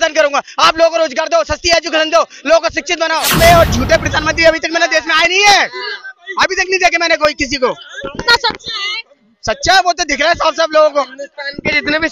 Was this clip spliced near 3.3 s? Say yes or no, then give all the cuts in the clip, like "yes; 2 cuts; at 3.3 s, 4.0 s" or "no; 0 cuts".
yes; 1 cut; at 3.3 s